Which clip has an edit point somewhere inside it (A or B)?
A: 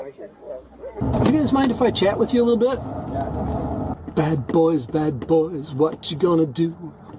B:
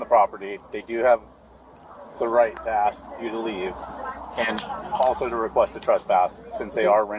A